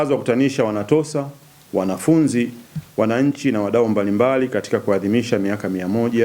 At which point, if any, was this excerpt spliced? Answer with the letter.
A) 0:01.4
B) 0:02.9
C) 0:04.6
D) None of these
D